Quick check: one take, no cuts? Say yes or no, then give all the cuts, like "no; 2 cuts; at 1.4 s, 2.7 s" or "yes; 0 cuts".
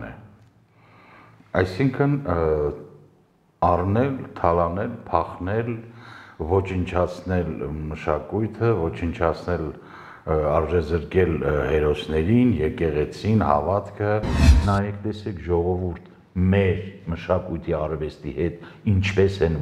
no; 1 cut; at 14.5 s